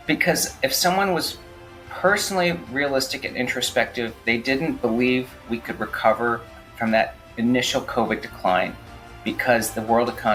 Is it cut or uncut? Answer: uncut